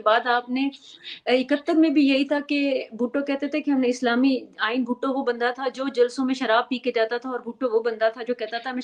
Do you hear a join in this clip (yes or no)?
no